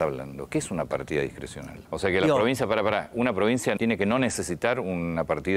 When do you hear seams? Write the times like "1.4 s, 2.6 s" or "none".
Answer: 1.8 s, 3.8 s